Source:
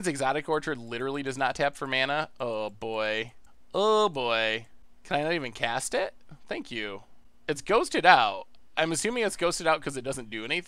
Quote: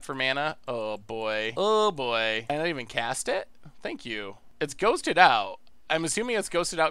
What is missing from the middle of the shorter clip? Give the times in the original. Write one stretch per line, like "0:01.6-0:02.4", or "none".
0:03.2-0:03.7
0:04.7-0:05.2
0:07.1-0:07.3

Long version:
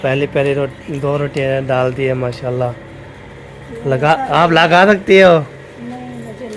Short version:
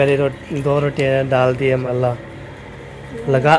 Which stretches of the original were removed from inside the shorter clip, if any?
0:02.2-0:02.4

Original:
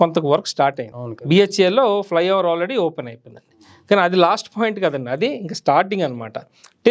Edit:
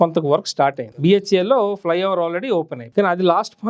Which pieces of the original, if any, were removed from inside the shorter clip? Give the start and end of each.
0:00.9-0:01.1
0:03.0-0:03.7

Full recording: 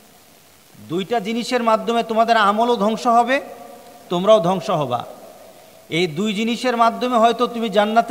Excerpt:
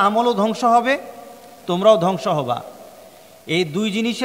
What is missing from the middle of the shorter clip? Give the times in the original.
none

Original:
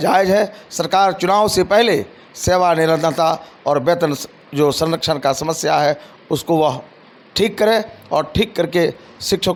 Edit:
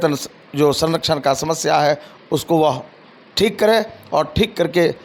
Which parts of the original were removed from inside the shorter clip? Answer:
none

